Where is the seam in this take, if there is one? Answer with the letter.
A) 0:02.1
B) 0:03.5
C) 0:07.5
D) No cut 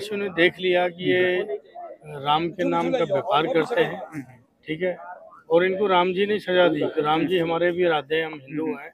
D